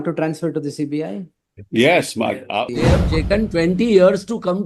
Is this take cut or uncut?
cut